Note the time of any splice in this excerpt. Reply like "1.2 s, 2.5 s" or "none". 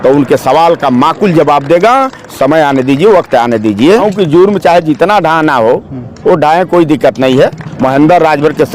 4.1 s, 7.6 s